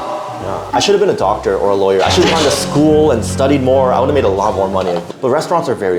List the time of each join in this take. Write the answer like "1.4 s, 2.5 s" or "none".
5.1 s